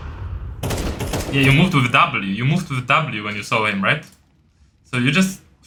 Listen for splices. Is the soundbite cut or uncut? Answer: uncut